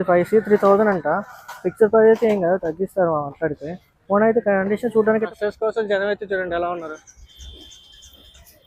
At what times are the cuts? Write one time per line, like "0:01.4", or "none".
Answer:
0:05.2